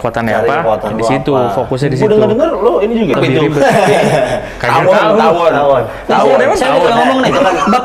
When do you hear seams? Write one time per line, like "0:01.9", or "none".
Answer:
0:03.1

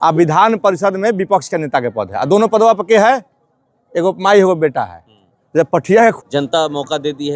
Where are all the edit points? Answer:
0:06.2

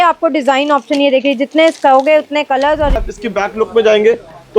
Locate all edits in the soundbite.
0:03.0

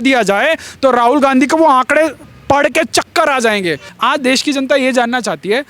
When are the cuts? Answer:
0:03.9

